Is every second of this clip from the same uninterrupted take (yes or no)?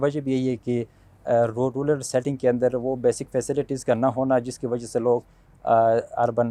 yes